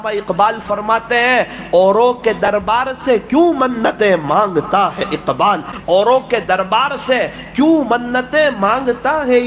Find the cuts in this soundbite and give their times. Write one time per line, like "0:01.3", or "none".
0:05.7